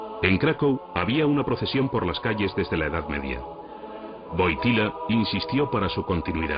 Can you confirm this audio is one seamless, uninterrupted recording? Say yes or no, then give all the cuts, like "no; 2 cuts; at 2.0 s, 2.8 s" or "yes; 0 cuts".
no; 1 cut; at 4.0 s